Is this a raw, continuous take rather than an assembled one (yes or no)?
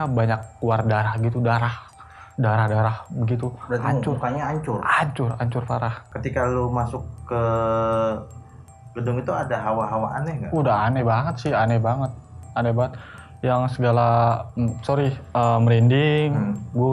no